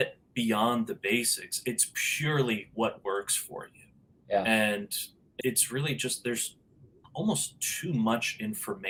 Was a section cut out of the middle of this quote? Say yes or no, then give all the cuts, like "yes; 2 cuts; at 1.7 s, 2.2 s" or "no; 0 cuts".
no; 0 cuts